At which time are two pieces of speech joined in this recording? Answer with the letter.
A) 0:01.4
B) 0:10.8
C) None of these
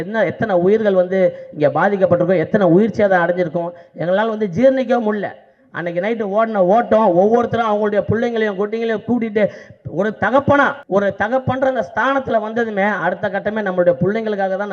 B